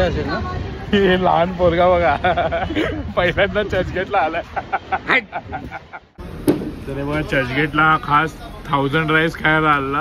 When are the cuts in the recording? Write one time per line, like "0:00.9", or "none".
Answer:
0:05.9